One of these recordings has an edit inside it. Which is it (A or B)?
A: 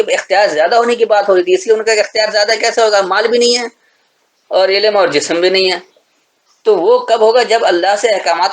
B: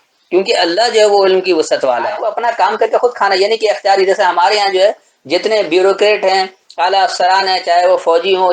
B